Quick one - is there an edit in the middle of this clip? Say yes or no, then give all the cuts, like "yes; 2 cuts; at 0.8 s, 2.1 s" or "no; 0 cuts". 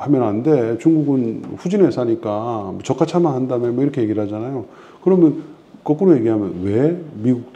no; 0 cuts